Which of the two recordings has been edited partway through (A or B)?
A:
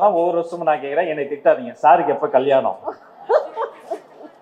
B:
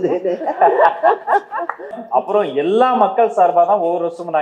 B